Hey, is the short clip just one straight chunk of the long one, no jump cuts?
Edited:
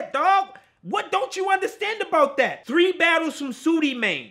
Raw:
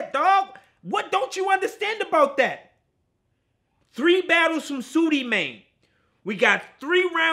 no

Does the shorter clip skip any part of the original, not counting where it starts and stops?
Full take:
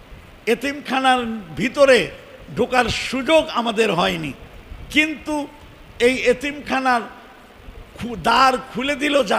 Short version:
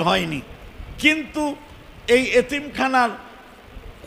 no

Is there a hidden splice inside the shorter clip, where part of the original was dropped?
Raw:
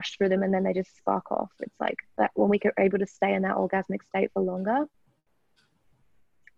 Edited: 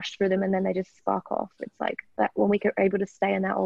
no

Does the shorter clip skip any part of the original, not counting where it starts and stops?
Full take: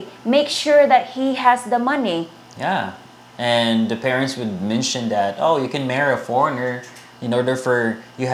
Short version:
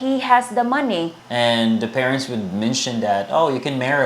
yes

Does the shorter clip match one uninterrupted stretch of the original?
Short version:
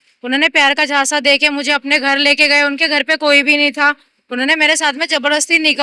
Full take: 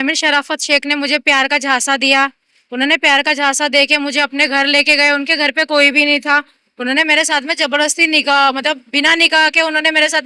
yes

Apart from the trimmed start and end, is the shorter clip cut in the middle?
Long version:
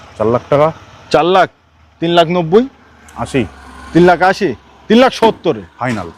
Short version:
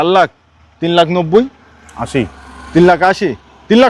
no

